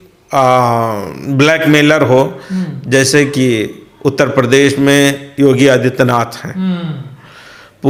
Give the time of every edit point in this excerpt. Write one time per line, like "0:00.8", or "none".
none